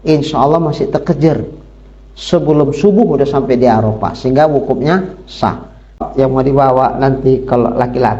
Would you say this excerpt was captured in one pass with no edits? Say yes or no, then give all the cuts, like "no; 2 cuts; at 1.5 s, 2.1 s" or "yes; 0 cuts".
no; 1 cut; at 6.0 s